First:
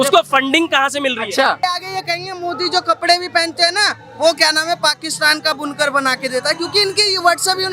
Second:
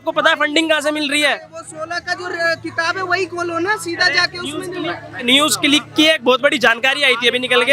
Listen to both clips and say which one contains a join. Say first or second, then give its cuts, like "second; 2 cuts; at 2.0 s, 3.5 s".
first; 1 cut; at 1.6 s